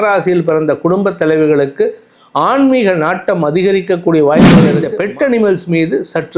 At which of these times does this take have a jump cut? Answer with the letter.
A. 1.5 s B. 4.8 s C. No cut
B